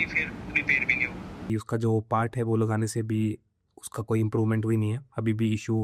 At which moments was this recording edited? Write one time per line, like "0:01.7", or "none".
0:01.4